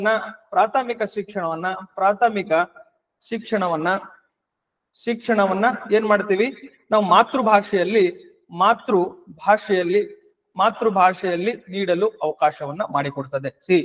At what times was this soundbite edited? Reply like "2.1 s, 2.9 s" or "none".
none

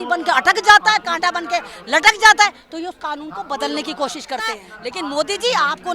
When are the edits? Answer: 4.8 s

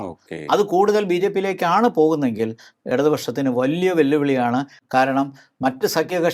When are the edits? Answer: none

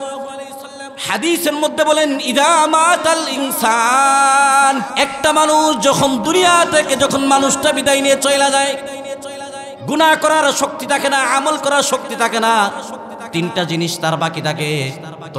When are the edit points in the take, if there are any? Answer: 4.9 s

